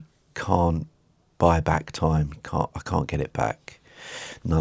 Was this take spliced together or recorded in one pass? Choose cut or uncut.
uncut